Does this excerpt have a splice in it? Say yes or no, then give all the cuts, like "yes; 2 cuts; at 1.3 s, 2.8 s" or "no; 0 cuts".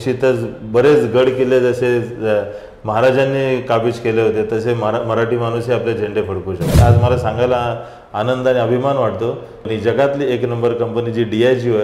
yes; 2 cuts; at 6.8 s, 9.6 s